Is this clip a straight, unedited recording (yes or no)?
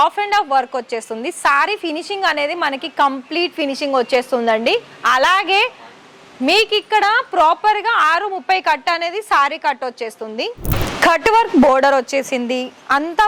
no